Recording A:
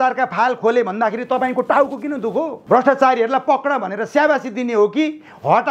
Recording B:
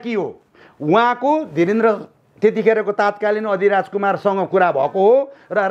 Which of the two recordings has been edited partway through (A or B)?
A